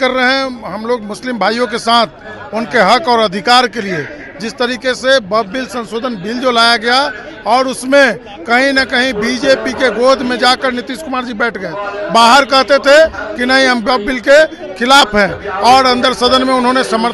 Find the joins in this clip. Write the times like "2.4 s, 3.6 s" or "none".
none